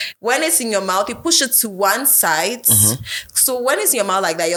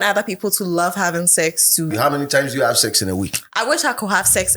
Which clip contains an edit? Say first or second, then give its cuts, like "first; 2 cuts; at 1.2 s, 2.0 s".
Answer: second; 1 cut; at 1.9 s